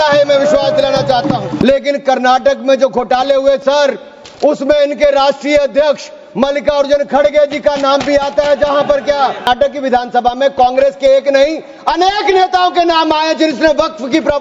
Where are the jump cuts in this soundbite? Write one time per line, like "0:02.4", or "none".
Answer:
0:01.6
0:09.5